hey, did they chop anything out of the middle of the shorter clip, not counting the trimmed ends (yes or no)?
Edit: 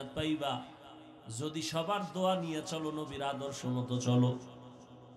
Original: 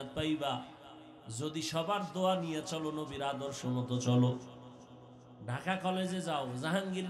no